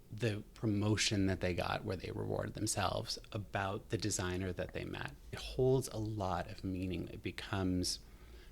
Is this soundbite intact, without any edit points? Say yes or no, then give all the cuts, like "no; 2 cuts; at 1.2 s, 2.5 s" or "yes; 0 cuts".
no; 2 cuts; at 5.4 s, 7.1 s